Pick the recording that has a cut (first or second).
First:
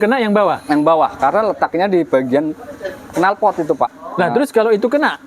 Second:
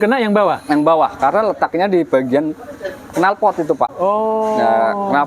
first